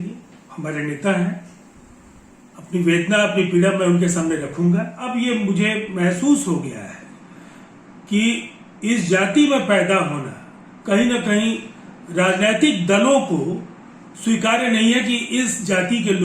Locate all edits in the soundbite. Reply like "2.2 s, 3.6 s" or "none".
5.0 s